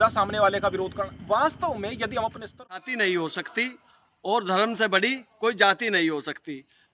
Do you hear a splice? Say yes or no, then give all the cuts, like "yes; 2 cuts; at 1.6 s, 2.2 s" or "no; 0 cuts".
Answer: yes; 1 cut; at 2.8 s